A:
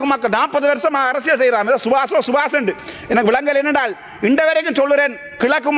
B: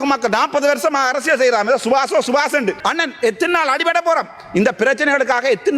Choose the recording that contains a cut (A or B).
B